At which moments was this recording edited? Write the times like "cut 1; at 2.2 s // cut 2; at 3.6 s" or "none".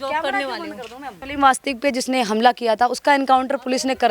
cut 1; at 1.2 s